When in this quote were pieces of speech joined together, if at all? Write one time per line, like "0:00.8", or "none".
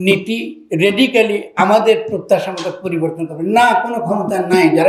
none

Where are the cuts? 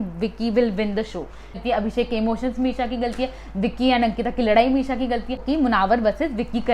0:01.6
0:05.4

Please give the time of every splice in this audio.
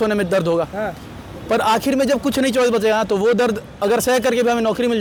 none

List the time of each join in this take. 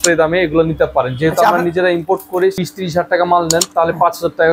0:02.6

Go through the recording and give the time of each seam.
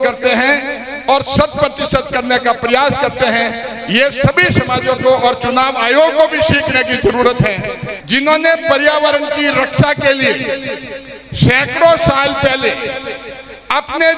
0:08.0

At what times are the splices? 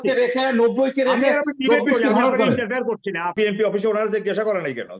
0:03.4

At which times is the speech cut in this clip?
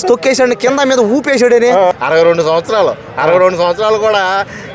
0:01.9

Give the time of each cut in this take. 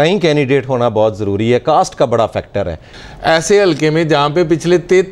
0:02.9

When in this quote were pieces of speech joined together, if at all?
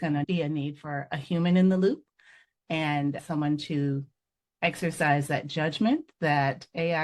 0:03.2

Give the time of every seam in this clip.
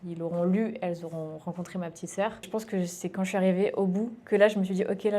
0:02.5

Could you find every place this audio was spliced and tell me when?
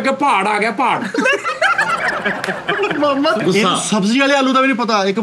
0:03.4

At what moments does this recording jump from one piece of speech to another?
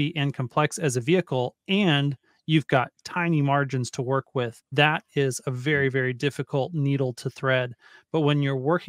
0:04.6

